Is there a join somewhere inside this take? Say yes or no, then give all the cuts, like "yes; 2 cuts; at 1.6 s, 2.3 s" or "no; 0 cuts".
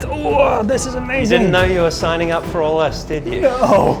no; 0 cuts